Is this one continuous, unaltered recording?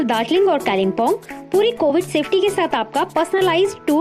yes; 0 cuts

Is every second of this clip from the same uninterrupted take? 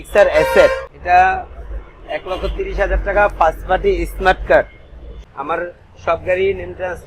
no; 2 cuts; at 0.9 s, 5.3 s

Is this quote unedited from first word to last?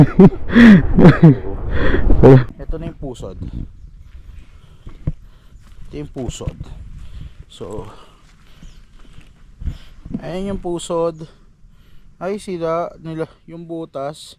no; 1 cut; at 2.4 s

